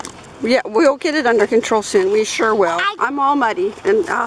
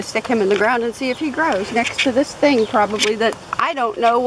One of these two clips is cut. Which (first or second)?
first